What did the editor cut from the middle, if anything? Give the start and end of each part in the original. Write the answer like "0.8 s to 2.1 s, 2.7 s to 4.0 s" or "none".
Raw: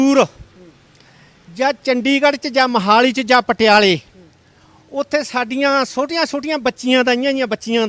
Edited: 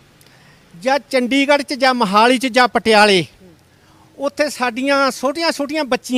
none